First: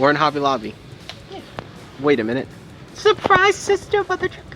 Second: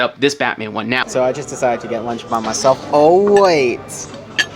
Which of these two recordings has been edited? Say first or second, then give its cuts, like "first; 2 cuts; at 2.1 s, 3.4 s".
second; 1 cut; at 1.0 s